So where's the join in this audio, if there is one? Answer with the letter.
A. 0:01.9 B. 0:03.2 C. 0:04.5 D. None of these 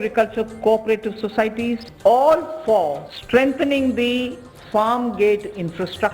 A